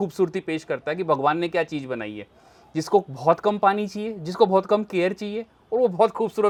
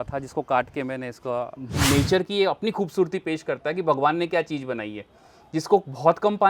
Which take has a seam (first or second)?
second